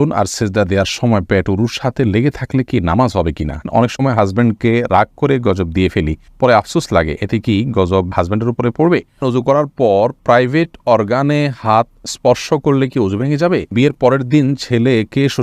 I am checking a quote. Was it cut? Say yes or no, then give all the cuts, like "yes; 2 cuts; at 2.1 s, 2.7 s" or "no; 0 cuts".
yes; 3 cuts; at 3.7 s, 9.2 s, 13.7 s